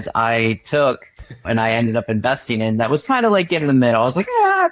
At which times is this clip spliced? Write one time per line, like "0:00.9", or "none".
0:01.4

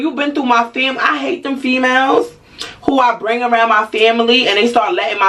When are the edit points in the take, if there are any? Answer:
none

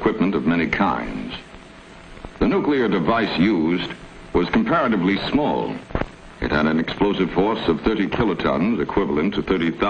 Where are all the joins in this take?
0:01.8

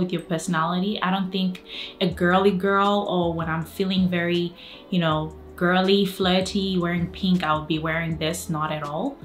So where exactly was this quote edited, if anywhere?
none

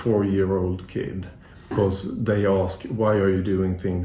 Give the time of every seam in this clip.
0:01.7

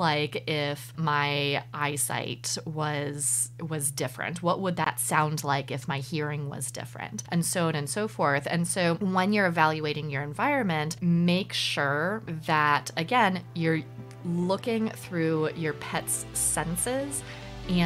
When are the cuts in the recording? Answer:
0:07.2

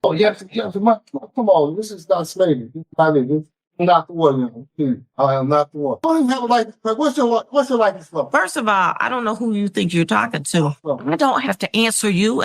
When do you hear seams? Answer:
0:06.0
0:10.8

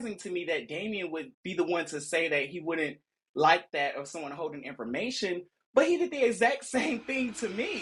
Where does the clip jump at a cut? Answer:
none

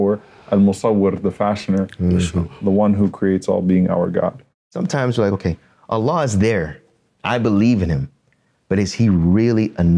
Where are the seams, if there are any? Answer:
0:04.7

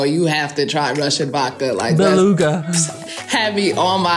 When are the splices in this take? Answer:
none

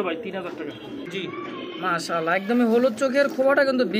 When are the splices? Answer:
0:01.0

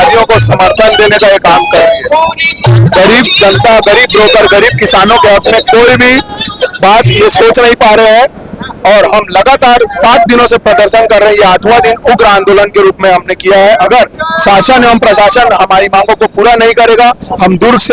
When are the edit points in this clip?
none

